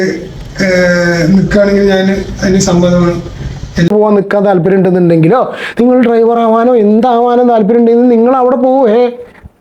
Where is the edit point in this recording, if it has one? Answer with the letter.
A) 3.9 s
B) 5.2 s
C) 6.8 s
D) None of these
A